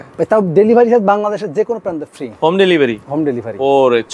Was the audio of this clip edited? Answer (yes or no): no